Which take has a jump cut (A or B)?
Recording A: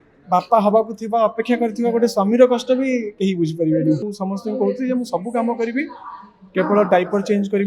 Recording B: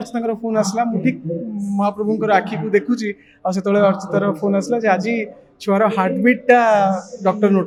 A